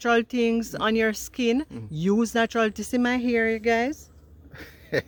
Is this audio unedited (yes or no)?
yes